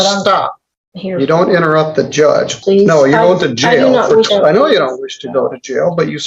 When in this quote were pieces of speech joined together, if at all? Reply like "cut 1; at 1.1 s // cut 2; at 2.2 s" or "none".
cut 1; at 2.6 s // cut 2; at 4.3 s

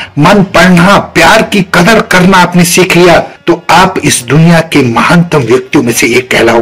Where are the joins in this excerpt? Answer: cut 1; at 3.3 s

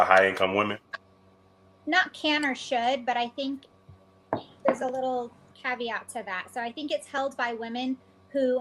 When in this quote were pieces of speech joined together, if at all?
none

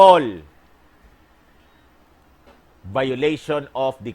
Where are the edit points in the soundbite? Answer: none

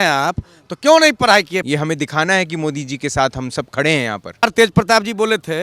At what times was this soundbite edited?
cut 1; at 1.6 s // cut 2; at 4.4 s

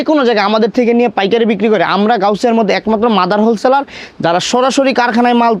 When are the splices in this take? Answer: none

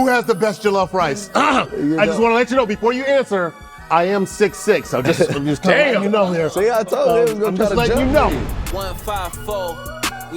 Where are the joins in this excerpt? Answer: cut 1; at 8.7 s

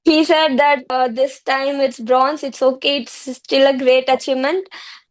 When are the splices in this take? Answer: cut 1; at 0.9 s

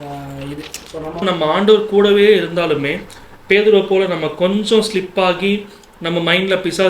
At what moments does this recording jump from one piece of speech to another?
cut 1; at 1.2 s

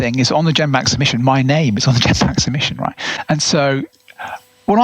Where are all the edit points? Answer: cut 1; at 3.1 s

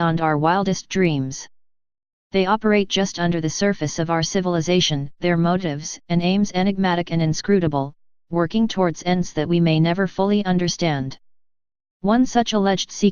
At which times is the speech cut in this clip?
cut 1; at 6.8 s

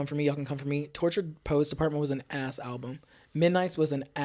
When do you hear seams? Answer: none

